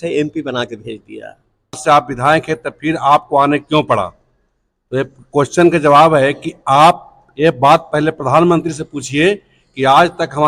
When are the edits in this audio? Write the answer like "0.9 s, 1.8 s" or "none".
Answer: 1.8 s